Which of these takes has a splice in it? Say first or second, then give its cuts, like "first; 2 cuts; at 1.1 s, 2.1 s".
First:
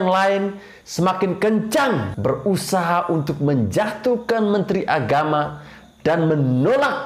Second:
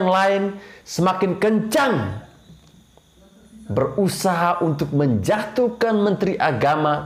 first; 1 cut; at 2.1 s